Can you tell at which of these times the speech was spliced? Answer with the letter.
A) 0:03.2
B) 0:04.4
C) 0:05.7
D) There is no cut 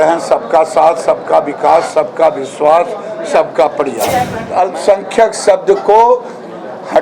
B